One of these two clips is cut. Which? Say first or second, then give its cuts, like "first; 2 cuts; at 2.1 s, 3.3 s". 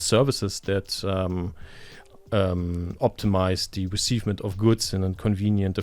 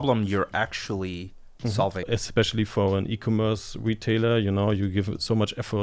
second; 1 cut; at 2.0 s